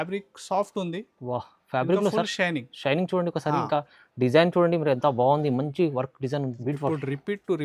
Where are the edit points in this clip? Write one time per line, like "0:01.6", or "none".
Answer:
0:06.5